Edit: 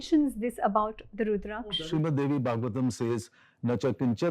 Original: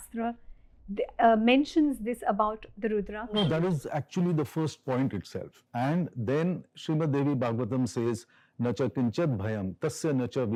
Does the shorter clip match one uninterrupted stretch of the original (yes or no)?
no